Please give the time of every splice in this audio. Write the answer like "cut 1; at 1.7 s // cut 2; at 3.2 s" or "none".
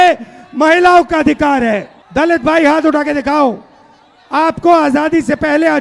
cut 1; at 2.0 s